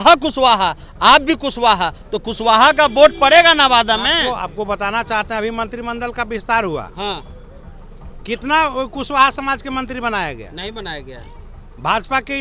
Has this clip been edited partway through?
no; 0 cuts

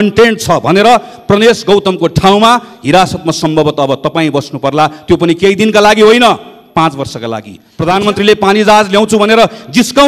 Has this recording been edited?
yes; 1 cut; at 7.6 s

